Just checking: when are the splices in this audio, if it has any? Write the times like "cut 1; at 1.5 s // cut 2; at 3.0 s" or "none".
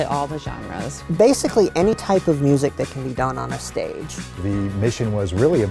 cut 1; at 0.9 s // cut 2; at 2.0 s // cut 3; at 4.4 s